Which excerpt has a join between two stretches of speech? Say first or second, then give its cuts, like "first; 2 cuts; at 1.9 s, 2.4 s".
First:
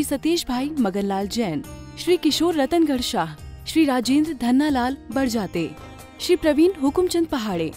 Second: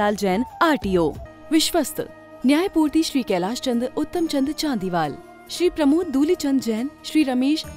second; 1 cut; at 1.3 s